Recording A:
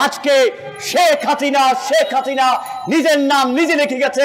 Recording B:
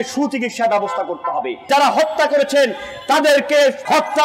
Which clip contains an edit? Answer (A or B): B